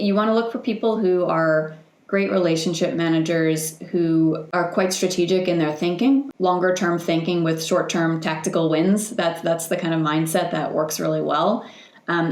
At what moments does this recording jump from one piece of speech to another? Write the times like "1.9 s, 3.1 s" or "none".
4.4 s, 6.3 s